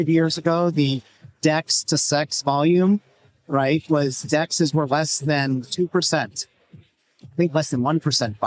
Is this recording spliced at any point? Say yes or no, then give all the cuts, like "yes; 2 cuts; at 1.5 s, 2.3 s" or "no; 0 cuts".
no; 0 cuts